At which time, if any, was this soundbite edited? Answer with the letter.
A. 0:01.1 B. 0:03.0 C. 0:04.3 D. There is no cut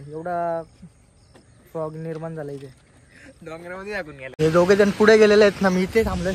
C